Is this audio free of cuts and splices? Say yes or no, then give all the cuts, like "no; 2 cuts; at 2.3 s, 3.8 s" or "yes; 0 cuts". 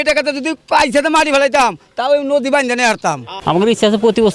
no; 1 cut; at 3.4 s